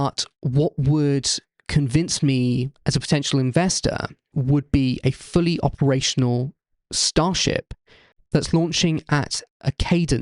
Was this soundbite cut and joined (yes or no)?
yes